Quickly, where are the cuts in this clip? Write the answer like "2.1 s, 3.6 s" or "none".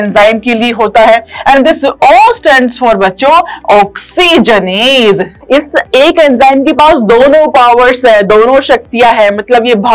5.3 s

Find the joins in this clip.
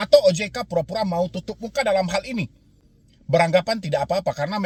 none

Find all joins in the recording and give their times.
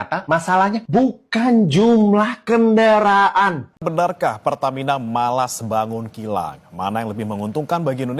3.7 s

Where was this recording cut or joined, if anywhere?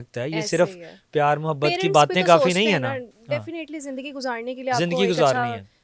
none

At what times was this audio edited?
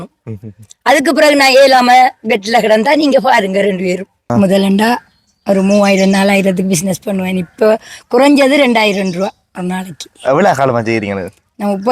4.2 s

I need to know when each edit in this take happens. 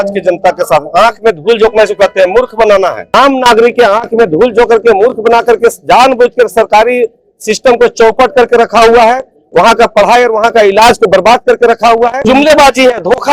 3.0 s, 12.2 s

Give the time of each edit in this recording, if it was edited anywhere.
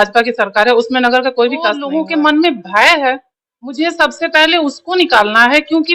1.8 s

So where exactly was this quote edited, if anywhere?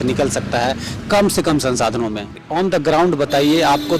2.4 s

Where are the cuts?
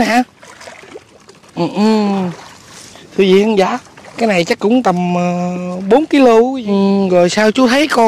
6.6 s

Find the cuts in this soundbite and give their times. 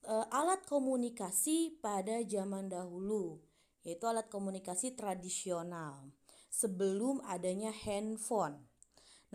none

